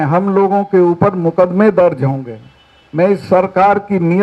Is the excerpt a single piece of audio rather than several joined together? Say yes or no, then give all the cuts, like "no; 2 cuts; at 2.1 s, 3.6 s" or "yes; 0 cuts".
yes; 0 cuts